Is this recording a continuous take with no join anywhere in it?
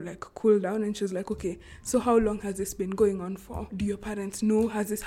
no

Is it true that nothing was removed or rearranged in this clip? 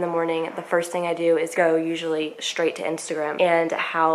no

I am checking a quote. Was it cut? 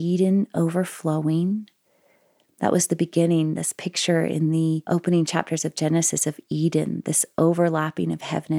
yes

